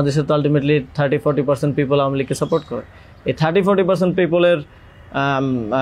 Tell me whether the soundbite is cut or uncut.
uncut